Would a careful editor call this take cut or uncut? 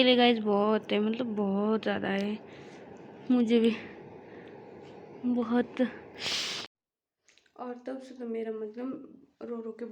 cut